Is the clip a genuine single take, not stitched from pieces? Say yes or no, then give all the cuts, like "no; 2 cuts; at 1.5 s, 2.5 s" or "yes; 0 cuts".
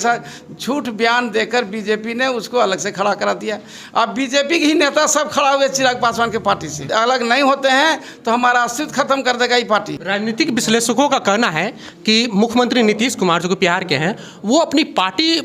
no; 2 cuts; at 6.8 s, 10.0 s